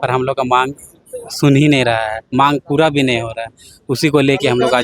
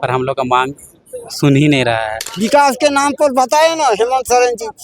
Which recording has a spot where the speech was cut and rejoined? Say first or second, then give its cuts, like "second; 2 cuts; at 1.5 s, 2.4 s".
second; 1 cut; at 2.2 s